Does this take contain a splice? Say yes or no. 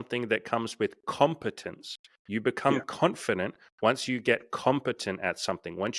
no